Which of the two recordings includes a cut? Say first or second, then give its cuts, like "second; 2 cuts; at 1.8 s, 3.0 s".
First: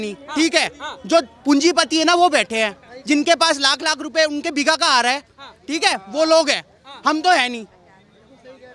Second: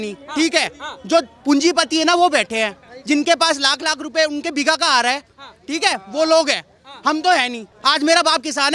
second; 1 cut; at 7.7 s